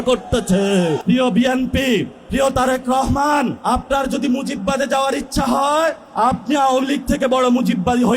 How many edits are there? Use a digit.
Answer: 4